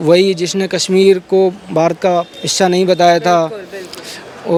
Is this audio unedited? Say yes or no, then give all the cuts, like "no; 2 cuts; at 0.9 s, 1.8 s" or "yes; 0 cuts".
yes; 0 cuts